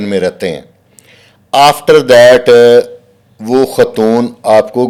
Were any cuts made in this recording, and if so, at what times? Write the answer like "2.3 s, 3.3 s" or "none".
none